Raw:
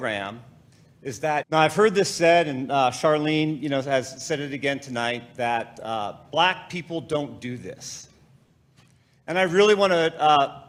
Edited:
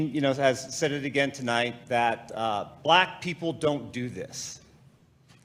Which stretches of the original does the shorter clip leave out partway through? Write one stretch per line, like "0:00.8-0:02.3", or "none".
none